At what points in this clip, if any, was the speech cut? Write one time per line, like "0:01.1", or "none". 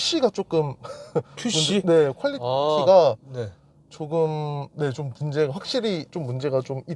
none